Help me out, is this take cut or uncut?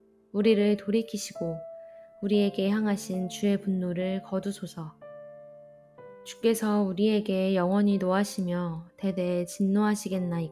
uncut